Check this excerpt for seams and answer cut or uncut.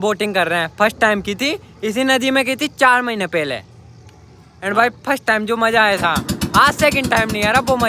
uncut